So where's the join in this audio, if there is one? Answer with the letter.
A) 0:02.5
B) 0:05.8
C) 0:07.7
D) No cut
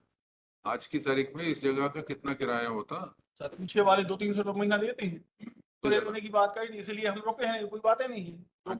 B